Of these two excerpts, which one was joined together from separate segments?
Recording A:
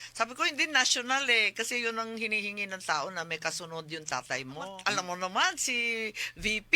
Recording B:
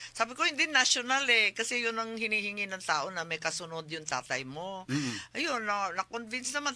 A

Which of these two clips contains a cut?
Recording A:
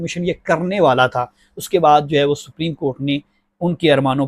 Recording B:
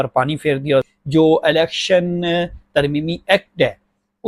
B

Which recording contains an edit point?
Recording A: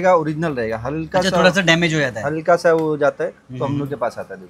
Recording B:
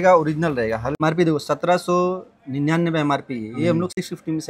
B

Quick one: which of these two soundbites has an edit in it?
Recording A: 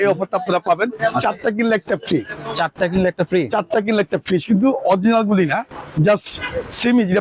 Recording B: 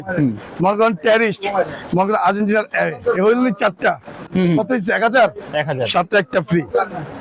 B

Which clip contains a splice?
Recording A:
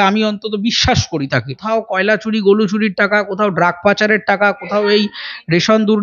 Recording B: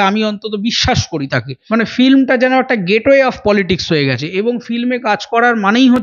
A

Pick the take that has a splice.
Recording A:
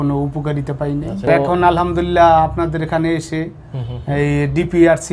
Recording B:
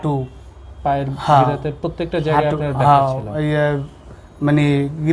A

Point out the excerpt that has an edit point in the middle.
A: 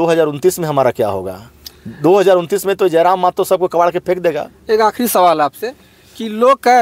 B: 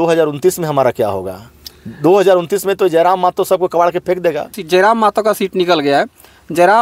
B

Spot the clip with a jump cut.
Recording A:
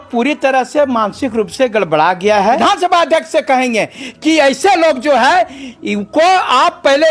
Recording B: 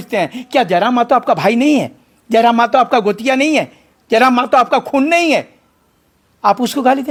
A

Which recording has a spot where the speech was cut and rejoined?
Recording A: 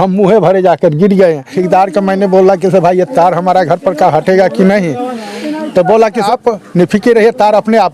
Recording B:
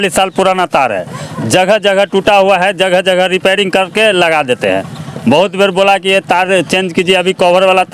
A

